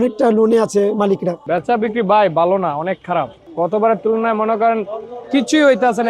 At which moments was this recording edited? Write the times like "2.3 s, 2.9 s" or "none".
1.3 s